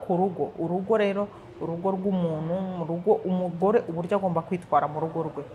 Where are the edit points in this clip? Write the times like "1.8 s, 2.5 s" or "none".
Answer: none